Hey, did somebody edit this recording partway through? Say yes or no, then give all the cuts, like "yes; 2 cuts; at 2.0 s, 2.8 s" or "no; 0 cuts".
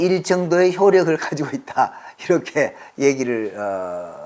no; 0 cuts